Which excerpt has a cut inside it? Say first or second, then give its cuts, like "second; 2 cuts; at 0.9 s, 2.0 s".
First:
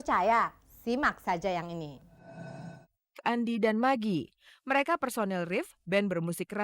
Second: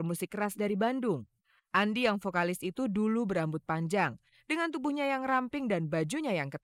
first; 1 cut; at 2.8 s